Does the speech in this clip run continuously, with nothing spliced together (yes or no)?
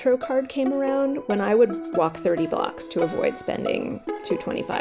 yes